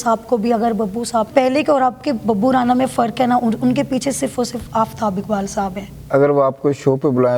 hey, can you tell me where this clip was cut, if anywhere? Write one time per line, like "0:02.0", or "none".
0:01.3
0:05.9